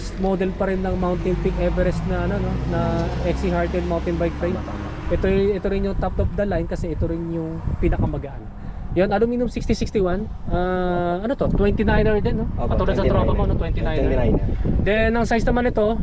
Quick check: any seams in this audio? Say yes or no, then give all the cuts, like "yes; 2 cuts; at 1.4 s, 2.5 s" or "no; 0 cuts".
no; 0 cuts